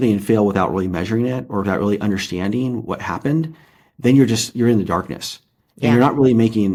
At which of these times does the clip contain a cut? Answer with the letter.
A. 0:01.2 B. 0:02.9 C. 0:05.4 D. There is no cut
D